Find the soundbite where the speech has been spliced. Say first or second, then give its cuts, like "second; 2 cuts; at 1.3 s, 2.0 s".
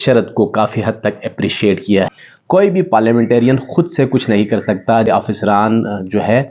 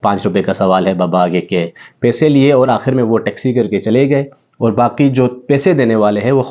first; 2 cuts; at 2.1 s, 5.1 s